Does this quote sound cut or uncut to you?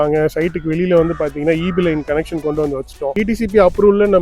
cut